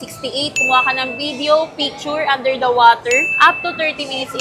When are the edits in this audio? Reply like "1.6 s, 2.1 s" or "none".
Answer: none